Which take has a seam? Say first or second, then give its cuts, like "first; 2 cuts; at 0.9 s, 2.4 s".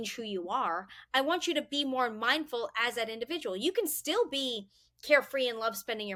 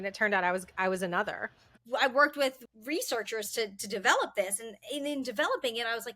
second; 2 cuts; at 1.7 s, 2.6 s